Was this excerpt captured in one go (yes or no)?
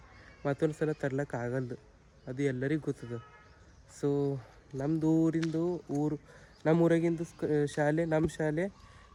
yes